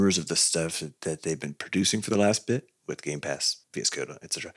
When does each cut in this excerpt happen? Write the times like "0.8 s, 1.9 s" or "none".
3.5 s